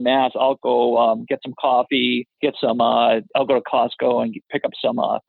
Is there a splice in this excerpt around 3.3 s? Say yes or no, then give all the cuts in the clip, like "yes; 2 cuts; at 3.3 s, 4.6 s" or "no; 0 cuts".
yes; 2 cuts; at 2.3 s, 3.3 s